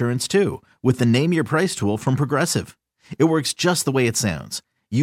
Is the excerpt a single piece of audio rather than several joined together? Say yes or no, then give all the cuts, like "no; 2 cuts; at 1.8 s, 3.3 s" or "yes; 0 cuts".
yes; 0 cuts